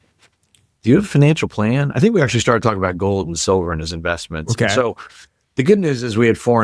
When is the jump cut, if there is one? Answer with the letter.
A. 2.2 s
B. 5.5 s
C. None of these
C